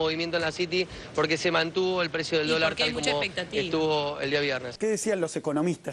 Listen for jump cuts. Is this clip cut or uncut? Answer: cut